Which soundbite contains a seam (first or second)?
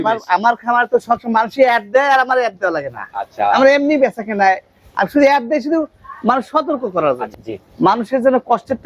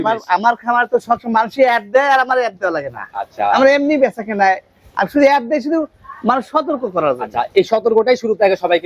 first